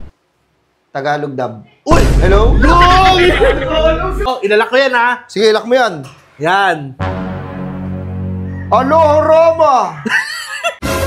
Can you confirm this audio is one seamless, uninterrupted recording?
no; 1 cut; at 4.3 s

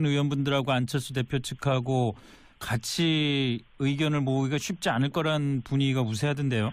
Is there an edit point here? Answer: no; 0 cuts

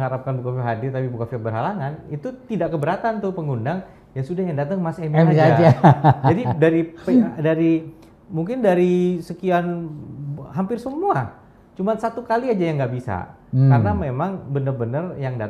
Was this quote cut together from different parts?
no; 0 cuts

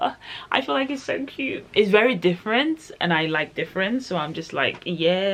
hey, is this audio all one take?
yes; 0 cuts

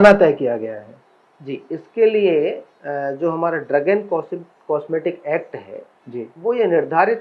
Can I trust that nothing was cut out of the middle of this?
yes; 0 cuts

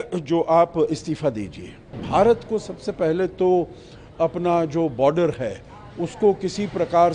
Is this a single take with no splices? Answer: no; 1 cut; at 2.0 s

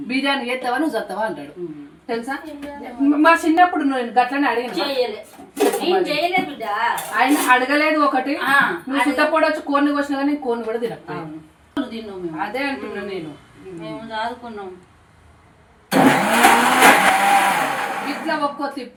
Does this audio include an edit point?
no; 0 cuts

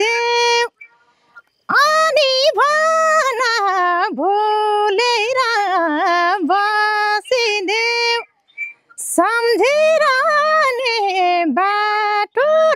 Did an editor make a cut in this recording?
no; 0 cuts

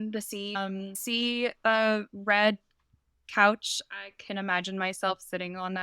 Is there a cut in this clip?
yes; 1 cut; at 0.9 s

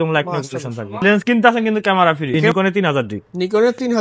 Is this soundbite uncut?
no; 2 cuts; at 1.0 s, 2.5 s

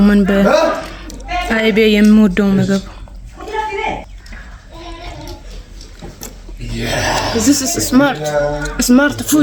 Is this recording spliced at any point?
no; 0 cuts

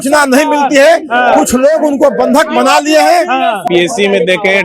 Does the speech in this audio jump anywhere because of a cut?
yes; 1 cut; at 3.6 s

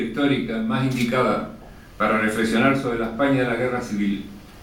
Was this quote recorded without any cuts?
yes; 0 cuts

